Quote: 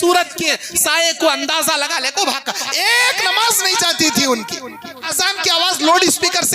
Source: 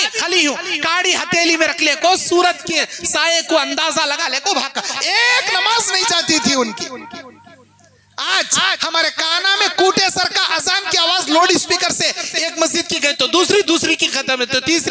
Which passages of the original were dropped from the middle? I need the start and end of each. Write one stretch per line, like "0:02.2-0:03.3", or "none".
0:07.3-0:10.5